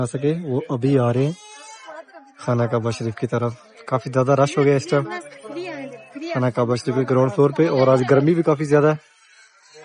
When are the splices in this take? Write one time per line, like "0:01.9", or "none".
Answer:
none